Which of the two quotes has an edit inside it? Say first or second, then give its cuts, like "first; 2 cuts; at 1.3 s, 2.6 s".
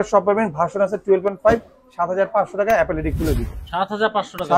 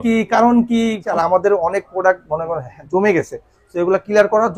second; 1 cut; at 1.1 s